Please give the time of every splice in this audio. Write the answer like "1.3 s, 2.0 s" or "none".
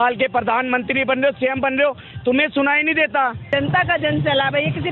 3.5 s